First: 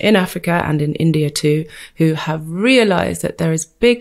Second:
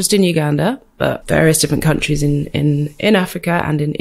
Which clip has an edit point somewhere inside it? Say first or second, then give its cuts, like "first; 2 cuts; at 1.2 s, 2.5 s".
second; 1 cut; at 1.2 s